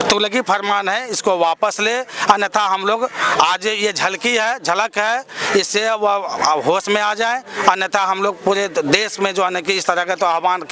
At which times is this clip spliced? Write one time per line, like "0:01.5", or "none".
none